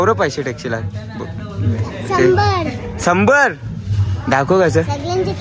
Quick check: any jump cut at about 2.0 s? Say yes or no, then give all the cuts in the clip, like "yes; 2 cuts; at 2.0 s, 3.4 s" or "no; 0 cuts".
no; 0 cuts